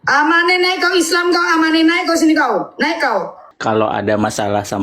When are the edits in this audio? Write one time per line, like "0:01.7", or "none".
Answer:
0:03.4